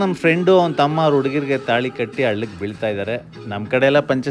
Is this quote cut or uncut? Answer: uncut